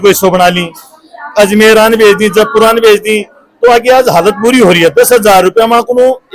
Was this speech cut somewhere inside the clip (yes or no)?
no